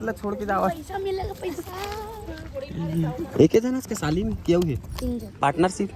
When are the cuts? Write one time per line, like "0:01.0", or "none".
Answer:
none